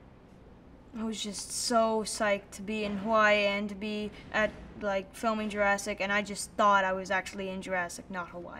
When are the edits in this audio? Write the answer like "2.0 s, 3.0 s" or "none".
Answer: 3.0 s